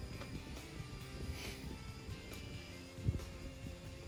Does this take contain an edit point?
no; 0 cuts

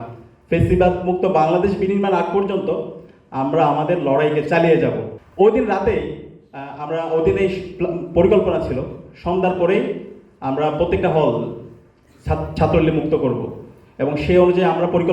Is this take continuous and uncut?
yes; 0 cuts

